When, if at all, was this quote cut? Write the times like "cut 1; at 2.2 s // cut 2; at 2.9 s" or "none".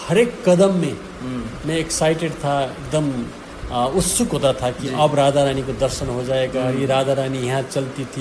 none